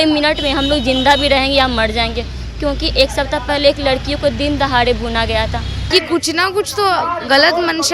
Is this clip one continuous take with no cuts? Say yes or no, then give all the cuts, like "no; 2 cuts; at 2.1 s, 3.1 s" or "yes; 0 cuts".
no; 1 cut; at 5.9 s